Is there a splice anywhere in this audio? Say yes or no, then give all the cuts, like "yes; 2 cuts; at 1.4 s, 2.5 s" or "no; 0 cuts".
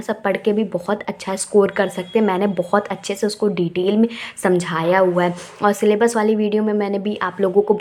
no; 0 cuts